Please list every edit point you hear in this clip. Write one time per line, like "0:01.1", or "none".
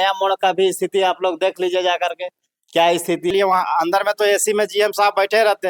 0:03.3